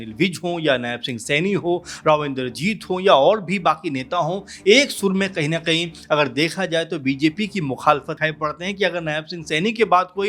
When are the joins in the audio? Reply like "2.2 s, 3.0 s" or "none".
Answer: 8.2 s